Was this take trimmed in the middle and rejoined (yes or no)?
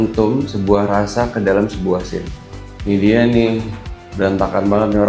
yes